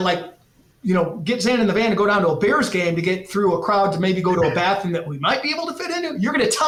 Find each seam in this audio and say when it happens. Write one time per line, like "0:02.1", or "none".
none